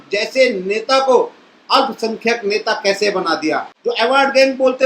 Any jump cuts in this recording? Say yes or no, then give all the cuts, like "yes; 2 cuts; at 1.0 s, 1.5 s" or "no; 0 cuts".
yes; 1 cut; at 3.7 s